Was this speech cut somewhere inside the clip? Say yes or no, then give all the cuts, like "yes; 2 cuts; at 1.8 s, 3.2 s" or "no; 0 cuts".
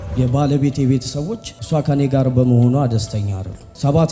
no; 0 cuts